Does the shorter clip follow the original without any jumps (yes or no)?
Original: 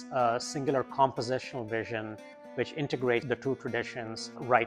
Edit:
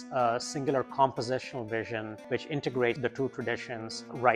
no